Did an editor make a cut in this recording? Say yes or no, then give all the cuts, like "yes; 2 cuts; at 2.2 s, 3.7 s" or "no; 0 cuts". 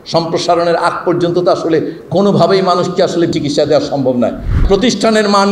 yes; 2 cuts; at 3.3 s, 4.6 s